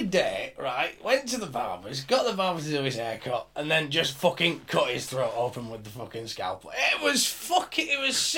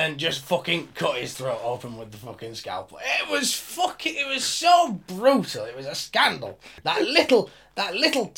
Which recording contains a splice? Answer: second; 1 cut; at 6.8 s

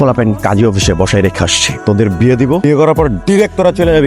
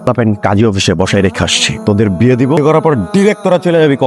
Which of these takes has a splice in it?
second; 1 cut; at 2.6 s

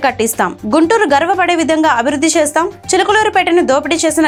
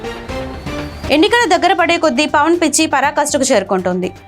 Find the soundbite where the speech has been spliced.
second; 1 cut; at 1.1 s

